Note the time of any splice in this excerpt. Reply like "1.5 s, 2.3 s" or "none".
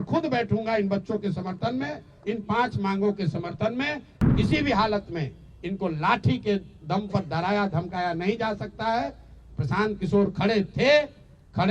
4.3 s